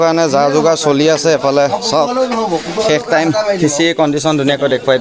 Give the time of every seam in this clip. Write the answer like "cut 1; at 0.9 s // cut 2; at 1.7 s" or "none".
none

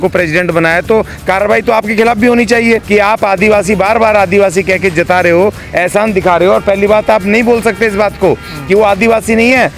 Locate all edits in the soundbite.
cut 1; at 2.8 s

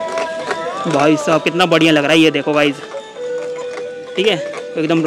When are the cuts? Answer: none

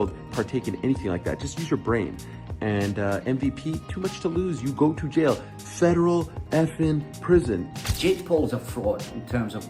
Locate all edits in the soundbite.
cut 1; at 7.7 s

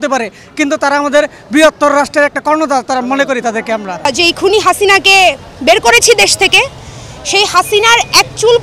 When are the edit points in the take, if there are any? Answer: cut 1; at 4.1 s

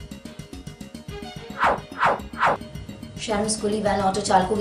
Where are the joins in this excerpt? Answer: cut 1; at 3.1 s

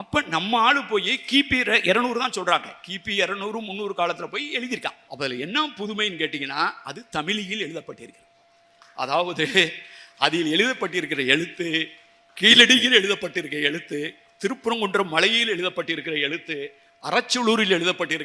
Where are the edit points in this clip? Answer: cut 1; at 5.0 s

